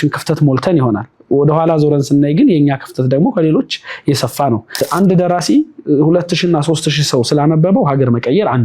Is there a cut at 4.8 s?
yes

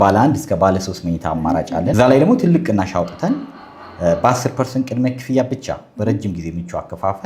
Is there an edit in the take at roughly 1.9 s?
yes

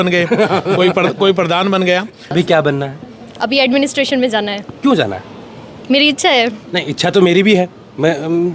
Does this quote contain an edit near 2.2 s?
yes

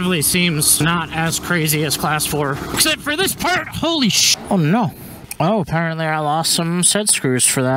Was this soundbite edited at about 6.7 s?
no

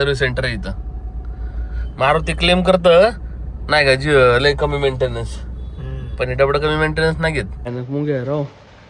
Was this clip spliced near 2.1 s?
no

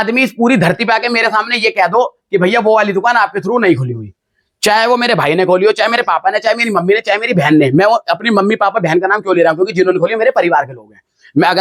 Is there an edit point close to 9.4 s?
no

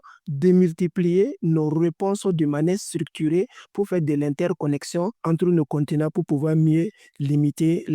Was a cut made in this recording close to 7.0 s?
no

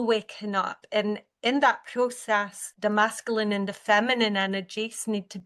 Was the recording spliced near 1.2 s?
no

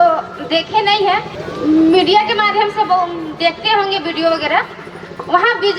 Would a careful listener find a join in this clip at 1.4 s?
yes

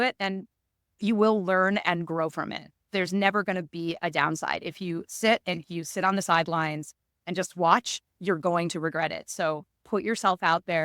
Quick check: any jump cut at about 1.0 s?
yes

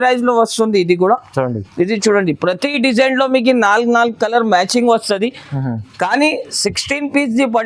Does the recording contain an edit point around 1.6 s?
no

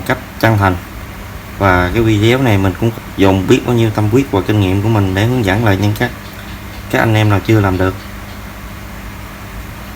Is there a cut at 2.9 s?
yes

